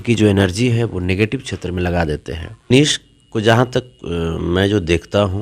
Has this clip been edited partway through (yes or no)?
yes